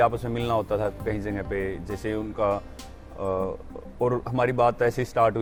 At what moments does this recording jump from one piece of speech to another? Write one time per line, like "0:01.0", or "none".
none